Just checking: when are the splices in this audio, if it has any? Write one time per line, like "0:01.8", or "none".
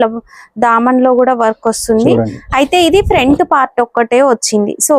none